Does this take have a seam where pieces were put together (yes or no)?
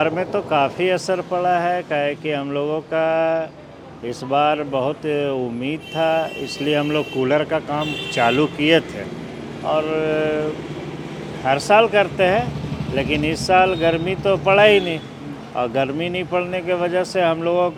no